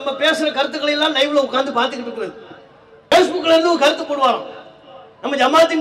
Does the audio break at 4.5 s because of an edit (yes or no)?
no